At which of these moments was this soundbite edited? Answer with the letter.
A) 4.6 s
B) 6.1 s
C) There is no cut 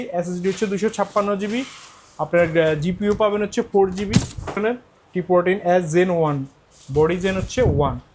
A